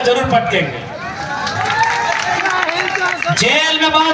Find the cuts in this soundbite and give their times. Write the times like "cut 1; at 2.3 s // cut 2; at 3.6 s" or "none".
none